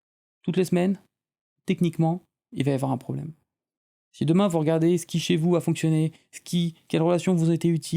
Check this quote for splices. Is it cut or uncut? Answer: cut